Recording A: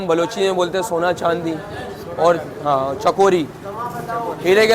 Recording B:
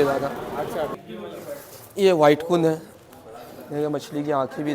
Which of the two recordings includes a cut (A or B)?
B